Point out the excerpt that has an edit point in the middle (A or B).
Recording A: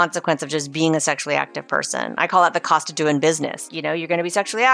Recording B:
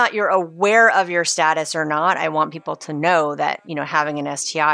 A